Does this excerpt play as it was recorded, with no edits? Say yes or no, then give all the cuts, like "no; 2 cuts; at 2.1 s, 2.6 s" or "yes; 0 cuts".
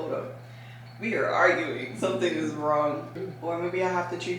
no; 1 cut; at 3.1 s